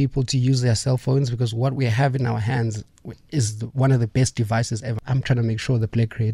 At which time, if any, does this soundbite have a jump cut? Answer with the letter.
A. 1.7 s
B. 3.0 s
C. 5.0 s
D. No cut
C